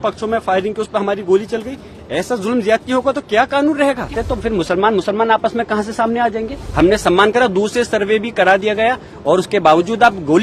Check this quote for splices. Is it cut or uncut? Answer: cut